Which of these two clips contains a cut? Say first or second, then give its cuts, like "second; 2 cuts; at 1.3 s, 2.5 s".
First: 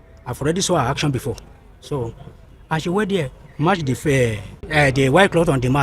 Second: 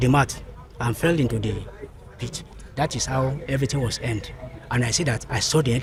first; 1 cut; at 4.6 s